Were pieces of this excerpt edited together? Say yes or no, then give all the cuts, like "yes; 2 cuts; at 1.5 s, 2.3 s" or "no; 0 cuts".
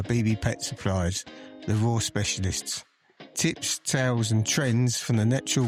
no; 0 cuts